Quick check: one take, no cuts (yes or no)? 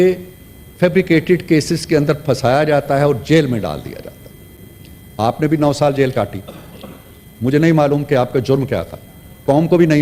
yes